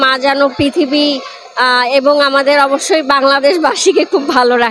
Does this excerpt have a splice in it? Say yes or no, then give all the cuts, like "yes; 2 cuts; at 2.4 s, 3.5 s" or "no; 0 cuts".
no; 0 cuts